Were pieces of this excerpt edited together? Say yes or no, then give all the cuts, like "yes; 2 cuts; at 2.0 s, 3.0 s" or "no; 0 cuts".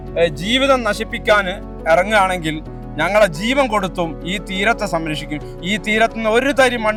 no; 0 cuts